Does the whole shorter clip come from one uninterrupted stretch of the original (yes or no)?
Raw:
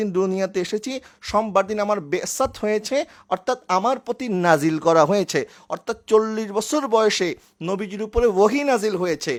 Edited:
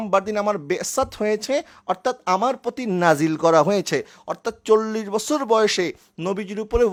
yes